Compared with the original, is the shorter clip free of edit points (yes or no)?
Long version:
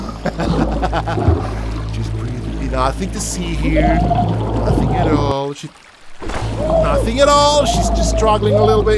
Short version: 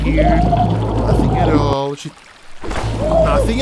yes